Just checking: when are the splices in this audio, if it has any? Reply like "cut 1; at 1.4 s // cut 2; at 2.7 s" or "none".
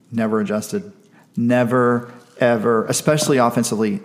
none

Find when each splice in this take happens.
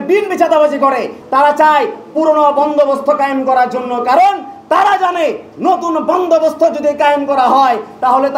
cut 1; at 1.2 s

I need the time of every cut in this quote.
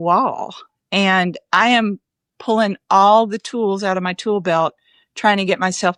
none

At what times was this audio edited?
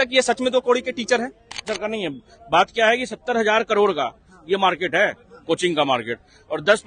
cut 1; at 1.6 s

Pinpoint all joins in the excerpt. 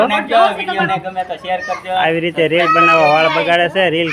none

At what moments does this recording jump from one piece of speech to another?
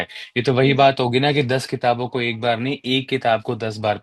none

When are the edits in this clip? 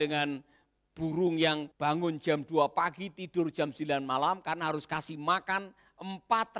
cut 1; at 1.7 s

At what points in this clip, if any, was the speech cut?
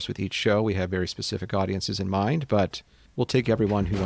cut 1; at 3.0 s

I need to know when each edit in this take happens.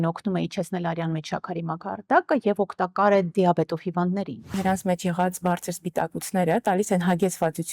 cut 1; at 4.6 s

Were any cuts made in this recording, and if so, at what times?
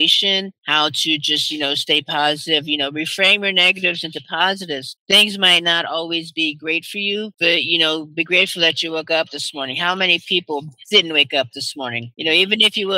none

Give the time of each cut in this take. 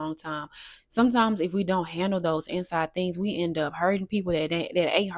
none

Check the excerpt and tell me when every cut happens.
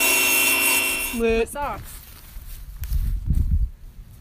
cut 1; at 1.0 s // cut 2; at 2.0 s

